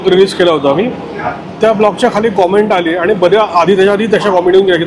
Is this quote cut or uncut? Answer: uncut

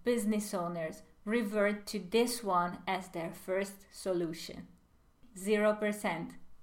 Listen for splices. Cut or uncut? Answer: cut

